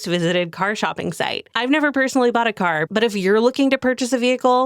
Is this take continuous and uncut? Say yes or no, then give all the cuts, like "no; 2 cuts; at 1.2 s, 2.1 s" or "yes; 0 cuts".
no; 1 cut; at 2.8 s